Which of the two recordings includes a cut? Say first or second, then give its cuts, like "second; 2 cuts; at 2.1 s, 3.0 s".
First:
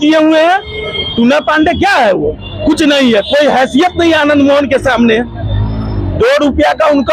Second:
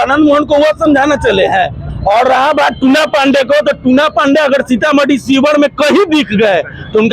second; 1 cut; at 1.8 s